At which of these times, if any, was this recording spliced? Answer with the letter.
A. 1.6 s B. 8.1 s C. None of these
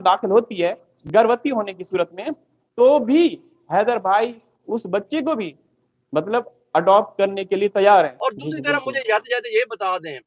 B